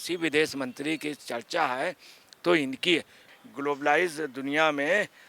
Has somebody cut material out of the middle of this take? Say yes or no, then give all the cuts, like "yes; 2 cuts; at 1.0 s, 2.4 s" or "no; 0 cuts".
yes; 1 cut; at 3.3 s